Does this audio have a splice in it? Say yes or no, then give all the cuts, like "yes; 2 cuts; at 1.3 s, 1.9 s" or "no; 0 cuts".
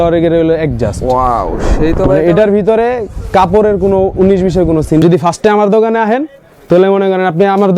yes; 1 cut; at 5.0 s